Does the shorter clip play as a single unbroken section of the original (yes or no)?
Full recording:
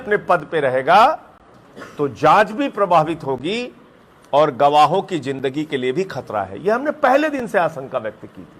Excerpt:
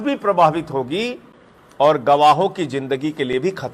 yes